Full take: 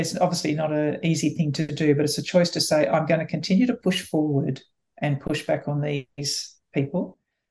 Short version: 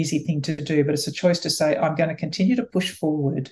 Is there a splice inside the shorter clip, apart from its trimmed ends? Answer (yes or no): no